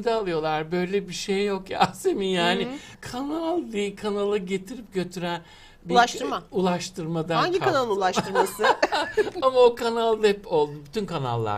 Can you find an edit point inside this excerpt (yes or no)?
yes